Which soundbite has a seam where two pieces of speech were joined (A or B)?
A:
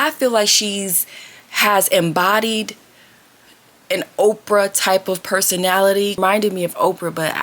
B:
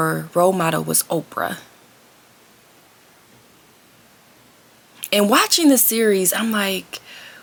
A